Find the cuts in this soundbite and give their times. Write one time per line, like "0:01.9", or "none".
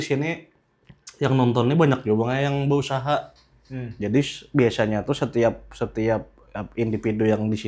none